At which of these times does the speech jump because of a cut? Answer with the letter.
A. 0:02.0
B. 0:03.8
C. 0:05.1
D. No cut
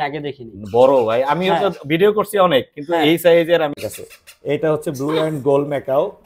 B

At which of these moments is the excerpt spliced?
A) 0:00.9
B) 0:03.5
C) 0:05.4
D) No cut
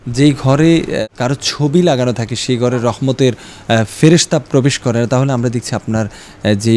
A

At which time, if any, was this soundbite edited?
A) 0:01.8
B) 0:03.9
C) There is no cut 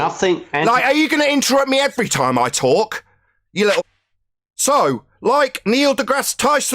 B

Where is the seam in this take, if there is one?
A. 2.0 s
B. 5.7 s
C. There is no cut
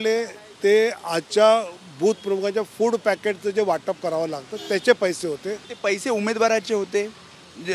B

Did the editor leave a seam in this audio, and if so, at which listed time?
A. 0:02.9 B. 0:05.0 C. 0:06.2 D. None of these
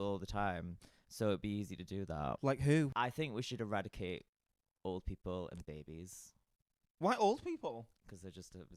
A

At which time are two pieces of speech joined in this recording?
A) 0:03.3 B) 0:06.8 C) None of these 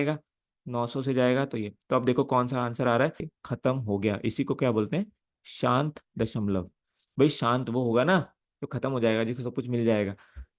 A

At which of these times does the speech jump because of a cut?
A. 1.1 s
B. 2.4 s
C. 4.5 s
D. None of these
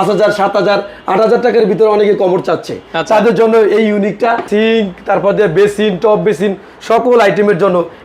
C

